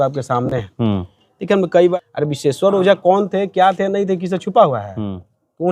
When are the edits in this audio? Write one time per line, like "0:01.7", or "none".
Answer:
0:01.9